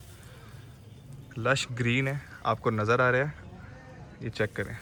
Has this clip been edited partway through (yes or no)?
no